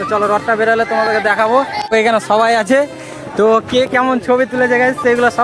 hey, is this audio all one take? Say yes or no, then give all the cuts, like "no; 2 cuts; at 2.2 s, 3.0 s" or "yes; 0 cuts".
no; 1 cut; at 1.9 s